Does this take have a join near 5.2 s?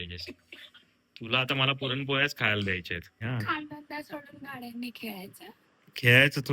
no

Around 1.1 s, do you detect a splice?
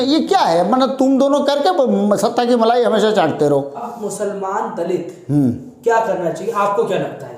no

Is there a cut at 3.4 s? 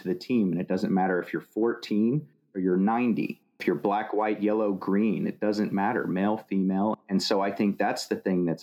yes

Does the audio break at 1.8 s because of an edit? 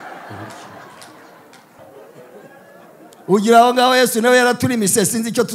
yes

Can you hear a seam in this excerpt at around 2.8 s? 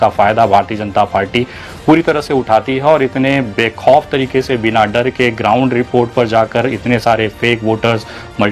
no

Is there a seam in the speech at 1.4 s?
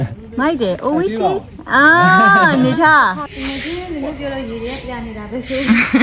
no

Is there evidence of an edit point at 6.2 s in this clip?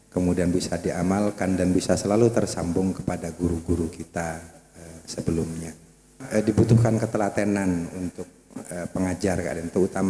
yes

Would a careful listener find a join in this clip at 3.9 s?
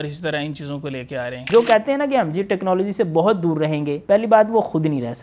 yes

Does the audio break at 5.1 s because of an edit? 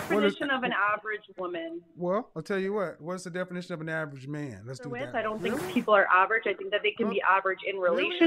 yes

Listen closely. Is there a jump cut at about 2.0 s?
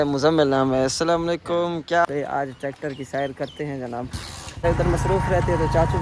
yes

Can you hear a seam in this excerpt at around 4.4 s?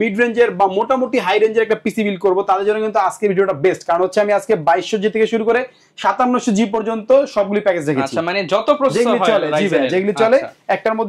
no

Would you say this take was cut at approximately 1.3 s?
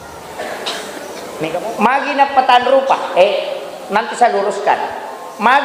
yes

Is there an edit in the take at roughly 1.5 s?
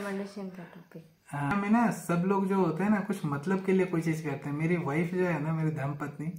yes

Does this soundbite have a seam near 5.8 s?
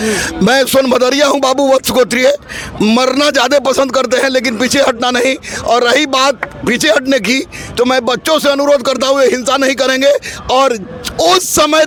no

